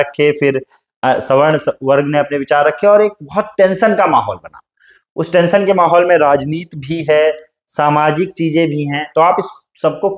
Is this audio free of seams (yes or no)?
yes